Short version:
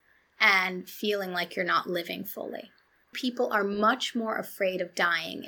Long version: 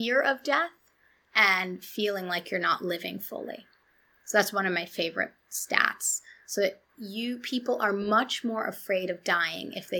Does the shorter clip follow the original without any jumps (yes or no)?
no